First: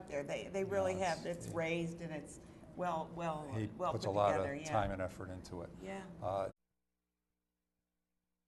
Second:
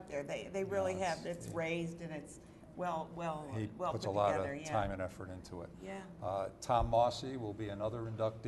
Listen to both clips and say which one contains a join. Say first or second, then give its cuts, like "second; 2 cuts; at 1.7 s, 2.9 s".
second; 1 cut; at 6.6 s